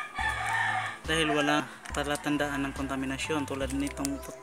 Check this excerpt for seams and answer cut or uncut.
cut